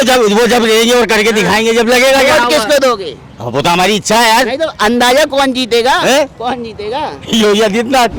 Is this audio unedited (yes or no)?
yes